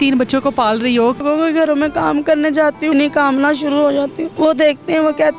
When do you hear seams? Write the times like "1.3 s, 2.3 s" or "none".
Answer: 1.2 s, 2.9 s, 4.2 s